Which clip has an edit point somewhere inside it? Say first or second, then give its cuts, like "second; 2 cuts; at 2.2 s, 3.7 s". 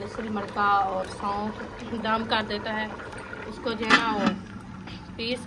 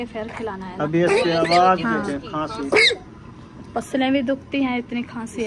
first; 1 cut; at 1.7 s